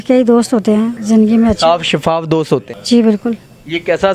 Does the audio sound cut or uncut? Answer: cut